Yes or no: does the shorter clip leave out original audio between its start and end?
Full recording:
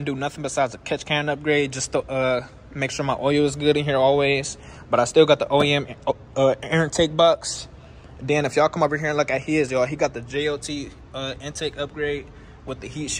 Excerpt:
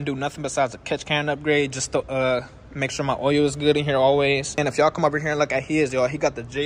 yes